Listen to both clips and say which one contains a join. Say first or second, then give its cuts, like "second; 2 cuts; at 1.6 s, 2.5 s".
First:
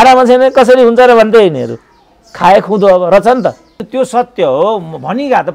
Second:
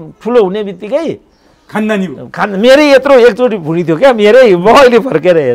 first; 1 cut; at 3.9 s